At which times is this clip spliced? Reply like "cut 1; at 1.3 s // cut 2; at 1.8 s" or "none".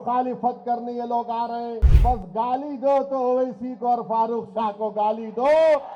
cut 1; at 1.9 s